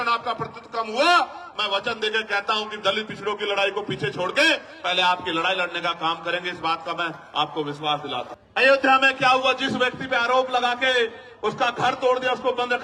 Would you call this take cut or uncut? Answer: cut